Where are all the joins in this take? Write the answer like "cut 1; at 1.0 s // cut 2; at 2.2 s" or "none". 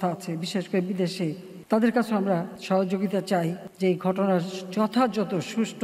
cut 1; at 1.5 s // cut 2; at 2.5 s // cut 3; at 3.6 s